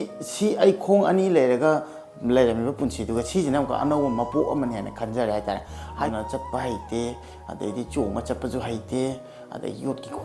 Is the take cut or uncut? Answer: cut